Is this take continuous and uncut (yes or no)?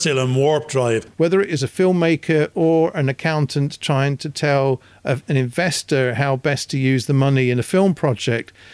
no